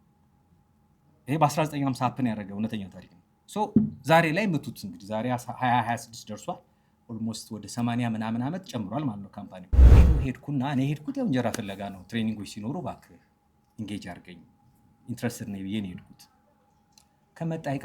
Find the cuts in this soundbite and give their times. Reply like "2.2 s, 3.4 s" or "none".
10.0 s

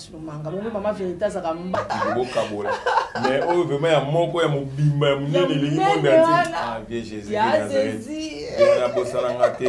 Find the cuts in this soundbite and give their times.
1.8 s

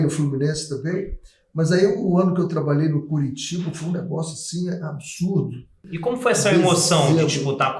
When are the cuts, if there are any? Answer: 5.8 s

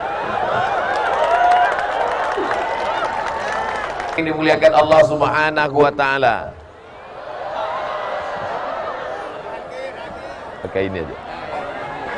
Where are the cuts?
4.2 s

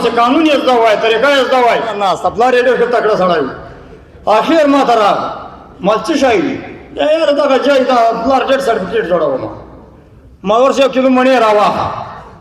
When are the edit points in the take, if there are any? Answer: 2.0 s

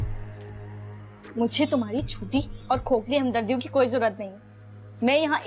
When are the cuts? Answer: 1.3 s

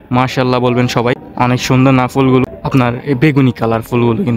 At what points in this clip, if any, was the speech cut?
1.3 s, 2.4 s

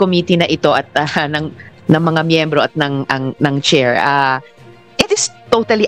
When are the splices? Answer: none

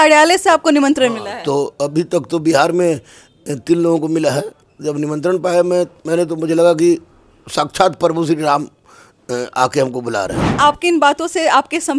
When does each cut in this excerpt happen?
4.7 s, 10.4 s

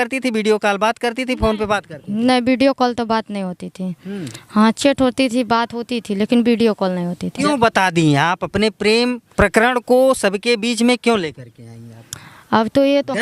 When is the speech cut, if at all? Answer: 7.3 s, 9.2 s

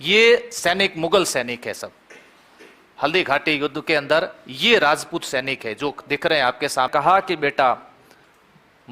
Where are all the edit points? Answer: 6.9 s

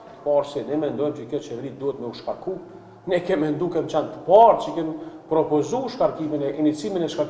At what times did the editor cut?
none

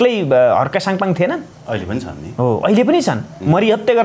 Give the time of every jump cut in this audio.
1.5 s

